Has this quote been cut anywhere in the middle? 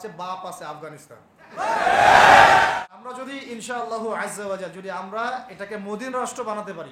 yes; 1 cut; at 2.7 s

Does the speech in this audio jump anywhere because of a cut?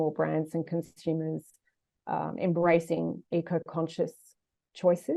no; 0 cuts

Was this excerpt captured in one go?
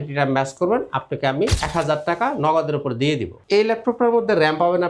no; 2 cuts; at 1.6 s, 3.4 s

